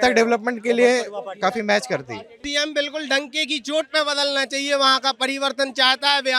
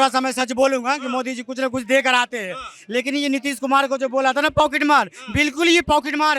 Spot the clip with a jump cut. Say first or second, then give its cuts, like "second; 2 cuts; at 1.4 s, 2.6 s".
first; 1 cut; at 2.4 s